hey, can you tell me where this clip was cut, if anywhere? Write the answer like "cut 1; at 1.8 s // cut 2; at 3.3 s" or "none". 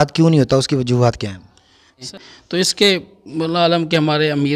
cut 1; at 2.1 s